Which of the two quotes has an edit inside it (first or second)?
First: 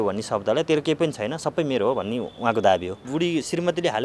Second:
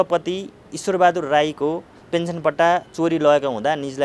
first